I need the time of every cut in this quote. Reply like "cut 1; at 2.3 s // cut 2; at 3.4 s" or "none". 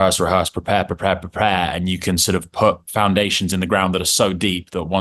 none